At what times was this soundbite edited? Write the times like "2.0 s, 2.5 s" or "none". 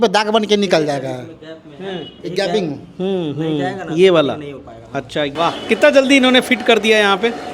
5.3 s